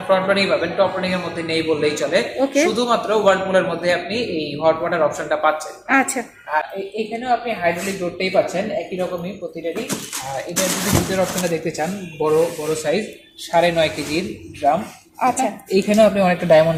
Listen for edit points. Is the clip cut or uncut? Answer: uncut